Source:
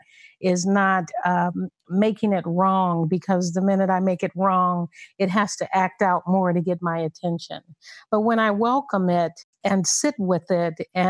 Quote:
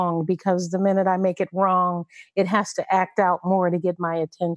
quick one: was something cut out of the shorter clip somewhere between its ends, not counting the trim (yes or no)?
no